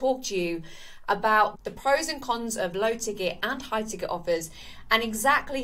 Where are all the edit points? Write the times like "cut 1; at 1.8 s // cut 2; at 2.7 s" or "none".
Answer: cut 1; at 1.5 s